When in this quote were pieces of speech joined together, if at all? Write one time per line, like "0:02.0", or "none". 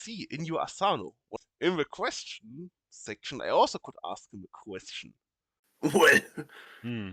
0:01.3
0:05.6